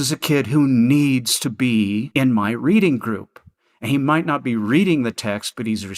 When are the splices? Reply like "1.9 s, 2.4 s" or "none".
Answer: 2.1 s